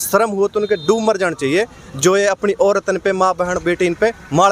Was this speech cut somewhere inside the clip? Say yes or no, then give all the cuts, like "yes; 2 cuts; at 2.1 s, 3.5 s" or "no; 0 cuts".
no; 0 cuts